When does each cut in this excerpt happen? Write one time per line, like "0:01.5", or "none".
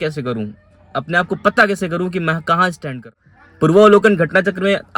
0:02.9